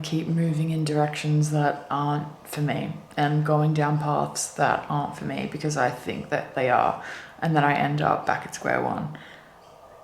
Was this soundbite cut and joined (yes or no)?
no